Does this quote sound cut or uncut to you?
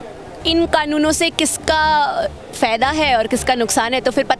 uncut